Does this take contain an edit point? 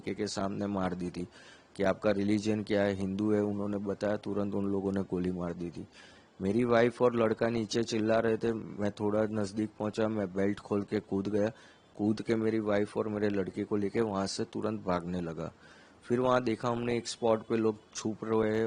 no; 0 cuts

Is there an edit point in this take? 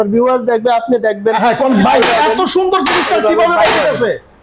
yes; 1 cut; at 1.8 s

